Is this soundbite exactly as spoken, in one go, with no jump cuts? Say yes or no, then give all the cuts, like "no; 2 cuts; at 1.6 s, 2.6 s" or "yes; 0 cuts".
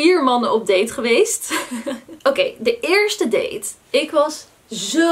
yes; 0 cuts